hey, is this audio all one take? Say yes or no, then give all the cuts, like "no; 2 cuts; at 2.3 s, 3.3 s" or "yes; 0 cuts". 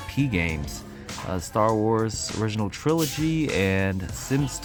yes; 0 cuts